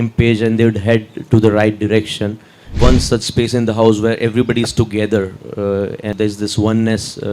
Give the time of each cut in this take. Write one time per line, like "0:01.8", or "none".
0:02.8
0:06.2